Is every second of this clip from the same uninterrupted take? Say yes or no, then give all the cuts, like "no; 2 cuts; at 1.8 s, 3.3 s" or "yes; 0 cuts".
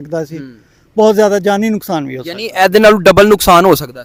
yes; 0 cuts